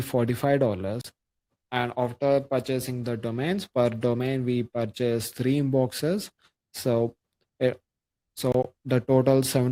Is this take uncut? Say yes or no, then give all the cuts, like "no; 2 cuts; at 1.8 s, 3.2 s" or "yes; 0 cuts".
yes; 0 cuts